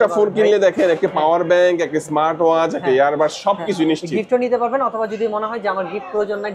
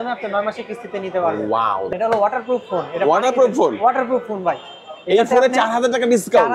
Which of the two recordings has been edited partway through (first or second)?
second